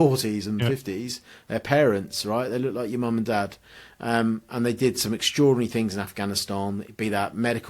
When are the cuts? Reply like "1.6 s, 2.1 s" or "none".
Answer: none